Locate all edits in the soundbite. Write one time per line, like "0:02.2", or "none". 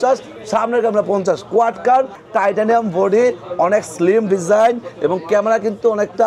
0:02.2